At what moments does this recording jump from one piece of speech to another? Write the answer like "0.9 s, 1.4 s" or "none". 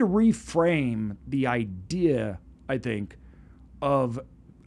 none